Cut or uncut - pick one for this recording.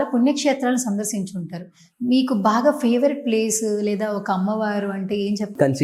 uncut